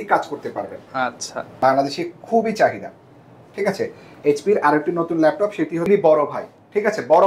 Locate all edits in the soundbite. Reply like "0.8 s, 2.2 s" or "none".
1.5 s, 5.9 s

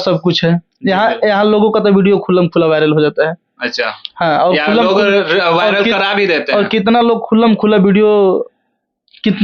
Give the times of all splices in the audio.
none

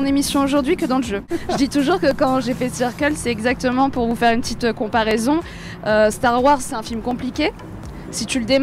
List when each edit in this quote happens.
1.3 s

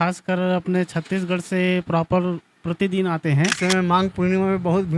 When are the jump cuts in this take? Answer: 3.6 s

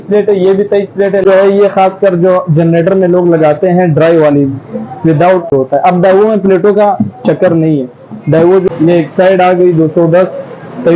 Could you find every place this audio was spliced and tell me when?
1.2 s, 5.5 s, 8.7 s

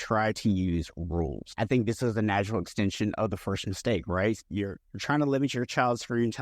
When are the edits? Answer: 1.5 s, 4.4 s

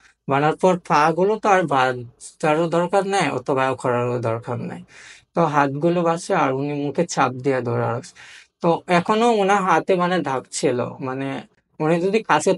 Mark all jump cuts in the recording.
none

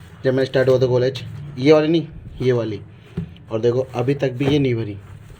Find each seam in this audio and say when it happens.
none

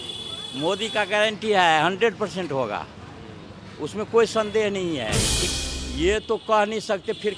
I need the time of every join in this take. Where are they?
5.4 s

